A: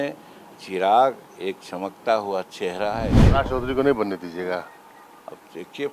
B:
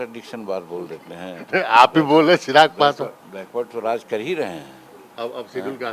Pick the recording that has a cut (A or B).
A